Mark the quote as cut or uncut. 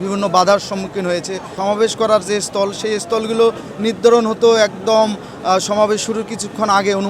cut